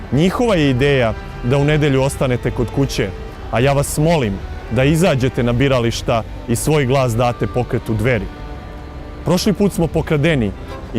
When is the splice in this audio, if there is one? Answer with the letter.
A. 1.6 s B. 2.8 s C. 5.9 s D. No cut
A